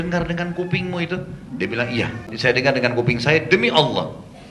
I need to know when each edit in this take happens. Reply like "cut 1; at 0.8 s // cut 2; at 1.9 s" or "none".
cut 1; at 2.3 s